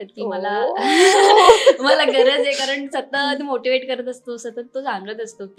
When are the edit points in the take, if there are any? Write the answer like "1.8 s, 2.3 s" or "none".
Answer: none